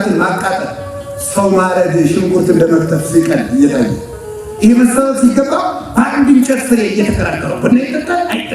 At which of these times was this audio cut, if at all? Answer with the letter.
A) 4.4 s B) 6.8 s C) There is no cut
C